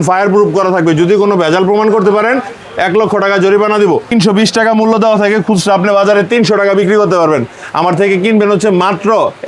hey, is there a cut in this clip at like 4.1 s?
yes; 1 cut; at 4.1 s

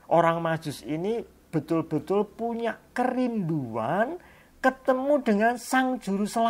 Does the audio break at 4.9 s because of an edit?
no; 0 cuts

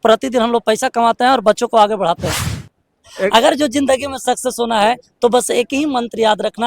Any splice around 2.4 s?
yes; 1 cut; at 2.4 s

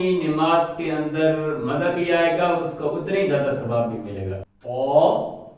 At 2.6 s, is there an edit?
no; 1 cut; at 4.3 s

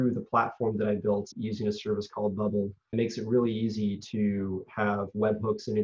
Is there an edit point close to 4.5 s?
no; 2 cuts; at 1.3 s, 2.9 s

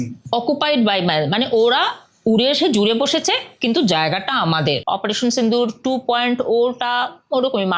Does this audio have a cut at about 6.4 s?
no; 1 cut; at 4.8 s

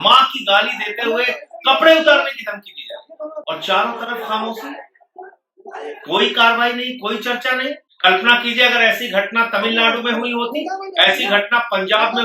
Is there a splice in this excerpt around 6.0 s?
no; 2 cuts; at 3.4 s, 7.9 s

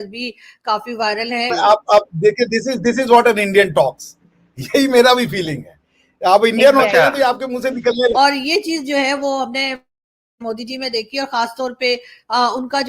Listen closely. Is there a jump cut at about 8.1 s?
yes; 2 cuts; at 1.5 s, 8.1 s

